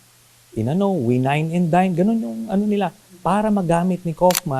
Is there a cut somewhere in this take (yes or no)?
no